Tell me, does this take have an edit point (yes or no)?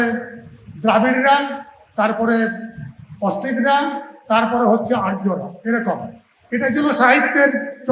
no